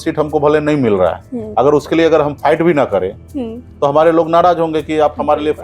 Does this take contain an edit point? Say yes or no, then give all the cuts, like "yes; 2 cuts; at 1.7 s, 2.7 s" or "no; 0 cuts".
no; 0 cuts